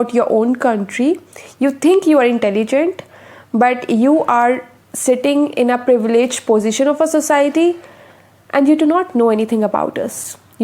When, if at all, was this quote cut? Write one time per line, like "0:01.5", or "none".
none